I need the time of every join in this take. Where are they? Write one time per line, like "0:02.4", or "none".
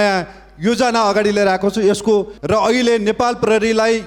0:02.3